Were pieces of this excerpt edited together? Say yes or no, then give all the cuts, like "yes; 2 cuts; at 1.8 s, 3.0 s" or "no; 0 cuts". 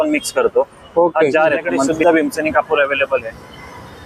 yes; 1 cut; at 1.9 s